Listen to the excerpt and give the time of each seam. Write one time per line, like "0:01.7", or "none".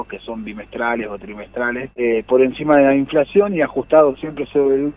0:01.9

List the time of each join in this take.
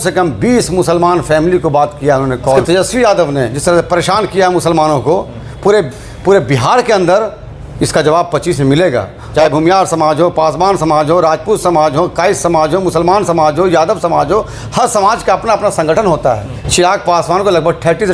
0:02.6
0:09.2
0:16.6

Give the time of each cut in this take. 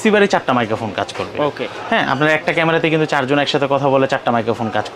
none

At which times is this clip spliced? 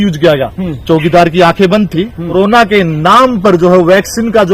0:02.3

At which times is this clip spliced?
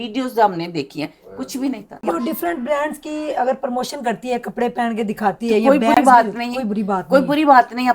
0:02.0

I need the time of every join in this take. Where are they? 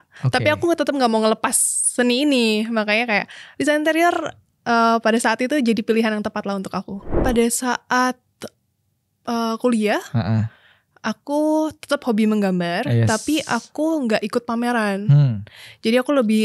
0:07.2

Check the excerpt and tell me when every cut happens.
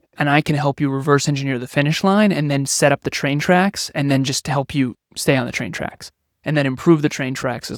none

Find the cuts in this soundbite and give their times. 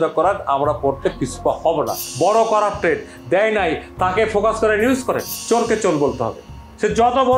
0:02.0
0:05.3

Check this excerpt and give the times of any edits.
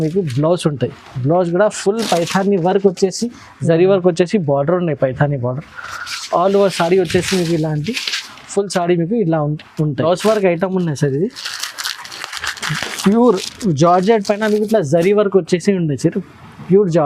0:10.0

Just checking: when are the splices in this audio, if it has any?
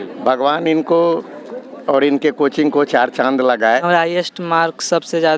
0:03.8

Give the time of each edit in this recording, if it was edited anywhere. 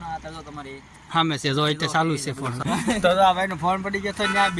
0:02.6

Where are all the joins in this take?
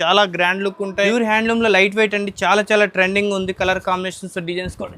0:01.1

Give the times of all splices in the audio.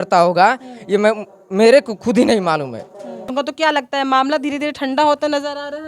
0:03.3

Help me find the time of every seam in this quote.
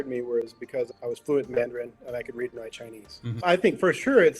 0:00.9
0:03.4

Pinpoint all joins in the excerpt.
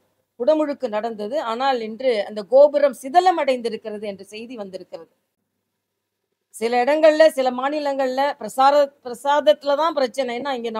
none

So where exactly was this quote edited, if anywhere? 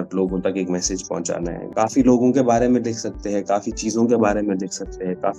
0:01.6

